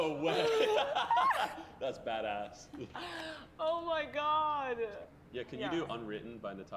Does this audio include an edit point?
no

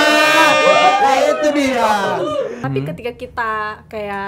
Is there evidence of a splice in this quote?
yes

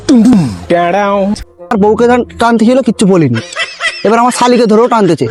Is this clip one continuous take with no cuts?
no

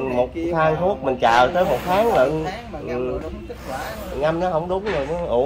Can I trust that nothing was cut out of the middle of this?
yes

